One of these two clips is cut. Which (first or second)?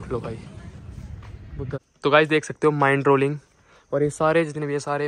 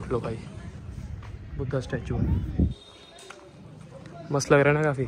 first